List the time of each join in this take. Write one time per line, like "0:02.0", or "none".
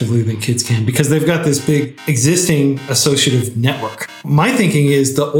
0:04.1